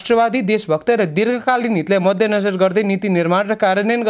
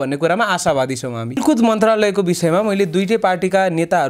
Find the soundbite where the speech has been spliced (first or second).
second